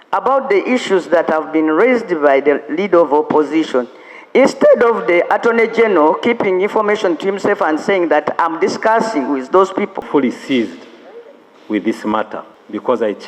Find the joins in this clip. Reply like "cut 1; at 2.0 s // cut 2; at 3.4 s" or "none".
cut 1; at 10.0 s